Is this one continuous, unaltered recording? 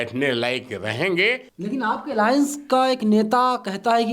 no; 1 cut; at 1.5 s

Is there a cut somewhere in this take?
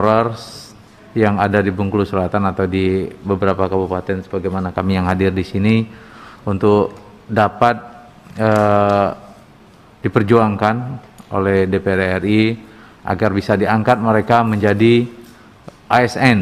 no; 0 cuts

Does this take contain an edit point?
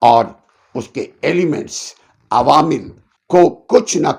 no; 0 cuts

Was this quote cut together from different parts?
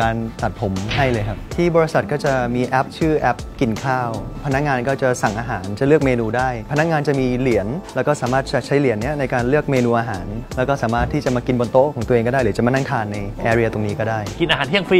no; 0 cuts

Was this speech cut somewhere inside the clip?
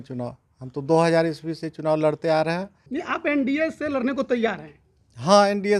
yes; 1 cut; at 2.9 s

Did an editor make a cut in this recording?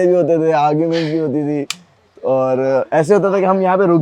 no; 0 cuts

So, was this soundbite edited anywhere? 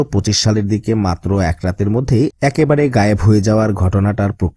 no; 0 cuts

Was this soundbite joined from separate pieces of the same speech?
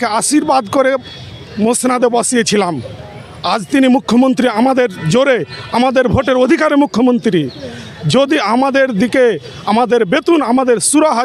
no; 0 cuts

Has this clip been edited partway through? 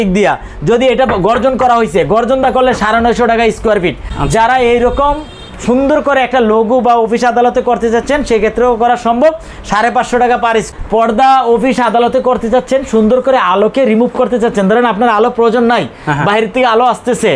yes; 2 cuts; at 4.1 s, 10.7 s

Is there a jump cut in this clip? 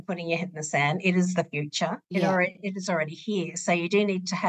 no; 0 cuts

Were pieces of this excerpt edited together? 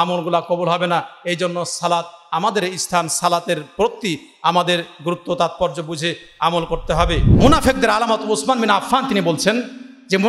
yes; 1 cut; at 7.3 s

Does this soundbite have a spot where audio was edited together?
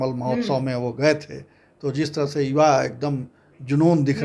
no; 0 cuts

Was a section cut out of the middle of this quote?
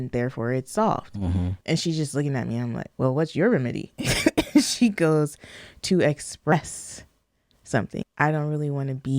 yes; 2 cuts; at 1.6 s, 8.0 s

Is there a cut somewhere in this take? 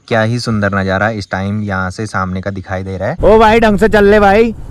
yes; 1 cut; at 3.2 s

